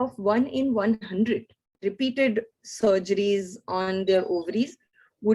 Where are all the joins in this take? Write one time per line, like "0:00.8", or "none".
0:01.8